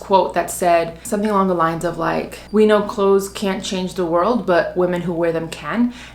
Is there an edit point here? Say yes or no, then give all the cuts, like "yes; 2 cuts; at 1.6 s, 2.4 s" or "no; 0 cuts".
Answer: no; 0 cuts